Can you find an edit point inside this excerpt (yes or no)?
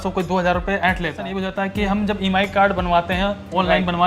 yes